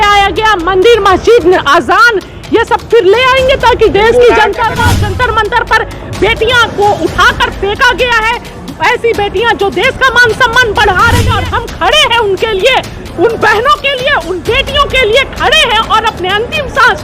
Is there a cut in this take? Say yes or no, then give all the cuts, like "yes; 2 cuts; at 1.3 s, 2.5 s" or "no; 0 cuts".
yes; 2 cuts; at 4.8 s, 11.3 s